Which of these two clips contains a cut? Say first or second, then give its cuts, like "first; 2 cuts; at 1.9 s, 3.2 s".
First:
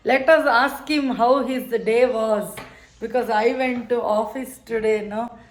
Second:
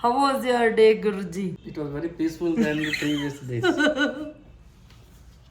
second; 1 cut; at 1.7 s